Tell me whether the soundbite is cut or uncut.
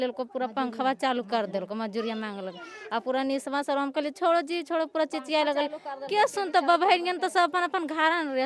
uncut